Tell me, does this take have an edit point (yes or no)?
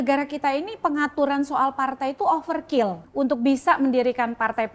yes